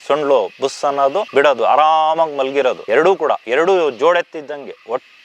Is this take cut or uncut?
cut